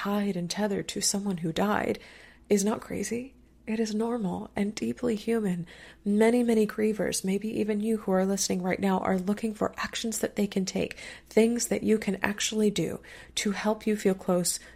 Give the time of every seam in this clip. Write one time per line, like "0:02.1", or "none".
none